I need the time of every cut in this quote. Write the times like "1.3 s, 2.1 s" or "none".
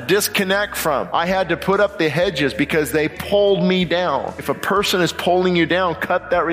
1.1 s, 3.2 s, 4.5 s